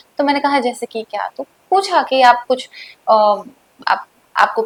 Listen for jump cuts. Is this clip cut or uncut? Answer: uncut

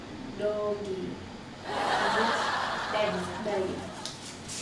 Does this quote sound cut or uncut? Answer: uncut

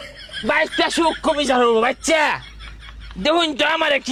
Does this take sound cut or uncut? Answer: uncut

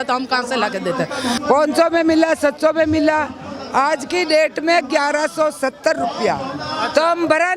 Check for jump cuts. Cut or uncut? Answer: cut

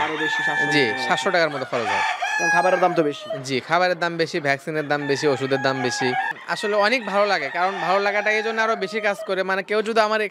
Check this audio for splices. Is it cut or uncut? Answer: cut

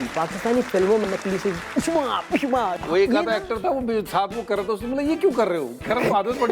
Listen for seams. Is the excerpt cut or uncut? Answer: cut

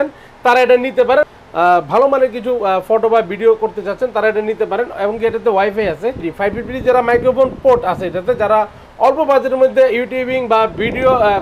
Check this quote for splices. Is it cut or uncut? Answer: cut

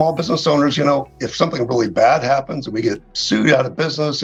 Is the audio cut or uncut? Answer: uncut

